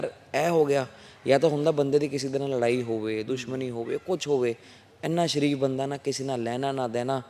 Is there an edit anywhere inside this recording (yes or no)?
no